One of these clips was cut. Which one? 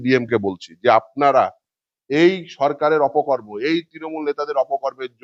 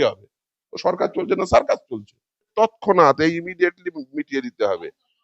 second; 1 cut; at 2.5 s

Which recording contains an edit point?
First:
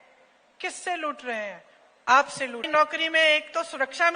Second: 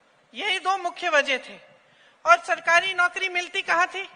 first; 1 cut; at 2.7 s

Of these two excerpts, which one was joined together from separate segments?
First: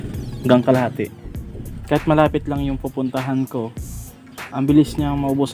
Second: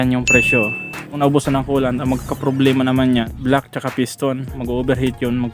second; 2 cuts; at 1.2 s, 4.5 s

